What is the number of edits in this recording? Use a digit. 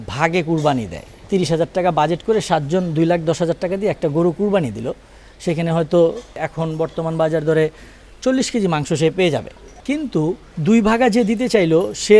3